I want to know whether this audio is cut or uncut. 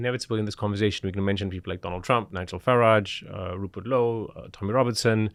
uncut